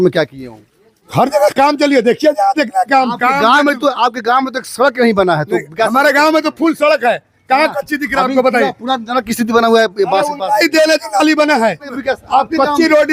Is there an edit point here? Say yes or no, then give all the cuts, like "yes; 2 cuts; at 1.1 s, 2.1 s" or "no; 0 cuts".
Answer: no; 0 cuts